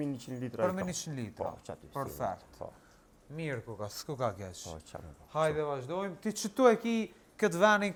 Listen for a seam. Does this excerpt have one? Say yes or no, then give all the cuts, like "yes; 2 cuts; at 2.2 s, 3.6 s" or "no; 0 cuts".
no; 0 cuts